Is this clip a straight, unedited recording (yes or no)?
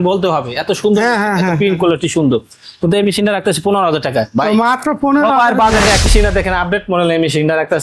no